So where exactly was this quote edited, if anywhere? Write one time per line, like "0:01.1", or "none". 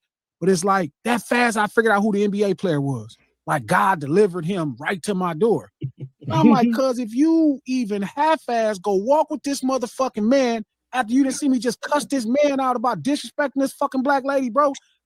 none